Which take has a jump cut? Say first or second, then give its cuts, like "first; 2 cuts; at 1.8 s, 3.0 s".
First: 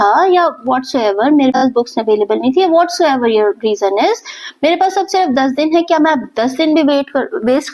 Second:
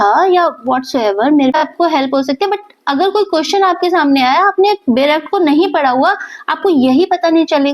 second; 1 cut; at 1.5 s